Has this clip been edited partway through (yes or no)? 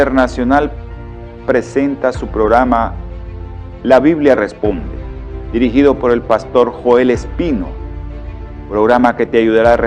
yes